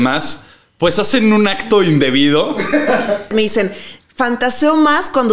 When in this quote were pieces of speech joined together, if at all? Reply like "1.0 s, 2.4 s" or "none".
3.3 s